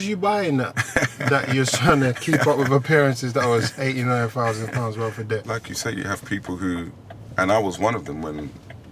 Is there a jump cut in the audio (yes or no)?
yes